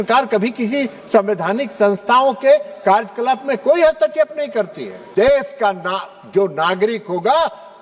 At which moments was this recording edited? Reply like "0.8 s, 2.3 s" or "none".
5.0 s